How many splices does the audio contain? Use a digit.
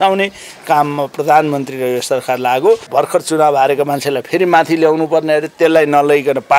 1